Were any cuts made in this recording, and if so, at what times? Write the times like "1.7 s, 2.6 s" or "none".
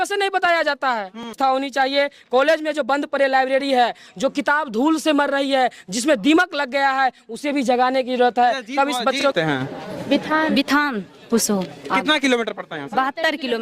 1.3 s, 9.2 s